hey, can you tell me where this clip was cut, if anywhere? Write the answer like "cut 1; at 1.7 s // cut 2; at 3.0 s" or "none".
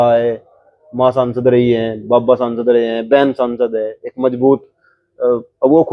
none